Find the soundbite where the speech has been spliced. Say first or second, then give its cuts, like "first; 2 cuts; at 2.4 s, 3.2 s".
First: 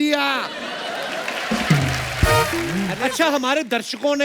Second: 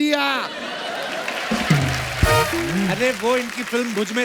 first; 1 cut; at 2.9 s